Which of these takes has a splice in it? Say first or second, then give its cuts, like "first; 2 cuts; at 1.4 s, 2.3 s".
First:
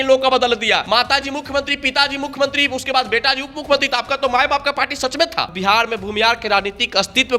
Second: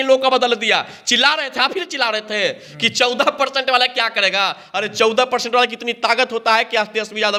first; 2 cuts; at 0.8 s, 5.5 s